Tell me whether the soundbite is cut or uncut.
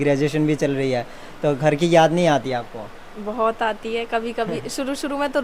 uncut